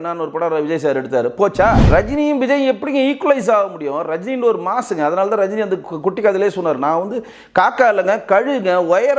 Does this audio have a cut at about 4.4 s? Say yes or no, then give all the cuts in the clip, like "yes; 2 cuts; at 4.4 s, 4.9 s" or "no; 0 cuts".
no; 1 cut; at 1.8 s